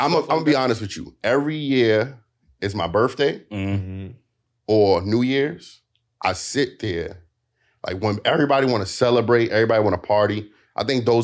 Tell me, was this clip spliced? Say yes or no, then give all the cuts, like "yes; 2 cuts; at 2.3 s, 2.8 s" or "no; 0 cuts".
no; 0 cuts